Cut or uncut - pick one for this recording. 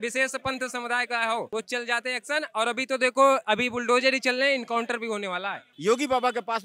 cut